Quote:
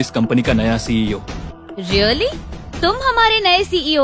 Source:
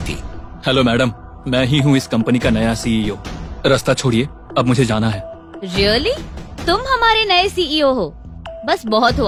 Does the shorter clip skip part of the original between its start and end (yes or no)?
yes